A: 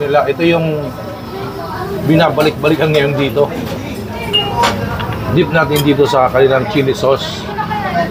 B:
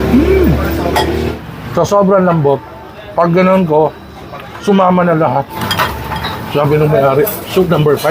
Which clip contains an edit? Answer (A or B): B